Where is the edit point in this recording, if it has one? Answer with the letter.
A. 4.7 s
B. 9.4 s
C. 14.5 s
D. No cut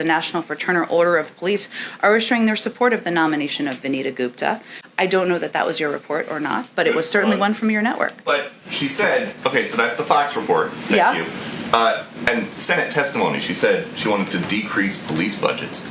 A